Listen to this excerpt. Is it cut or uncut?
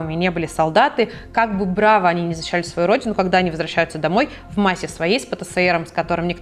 uncut